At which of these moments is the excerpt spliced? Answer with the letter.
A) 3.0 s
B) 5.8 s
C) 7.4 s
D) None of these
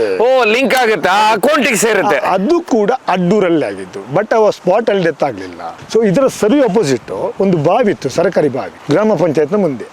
B